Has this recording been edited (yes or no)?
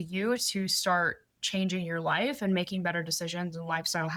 no